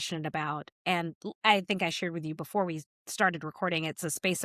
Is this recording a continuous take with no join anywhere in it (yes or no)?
yes